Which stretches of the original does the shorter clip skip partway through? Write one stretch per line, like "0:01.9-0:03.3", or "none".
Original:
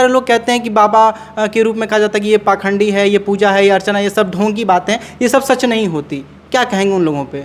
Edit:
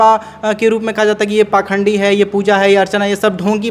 none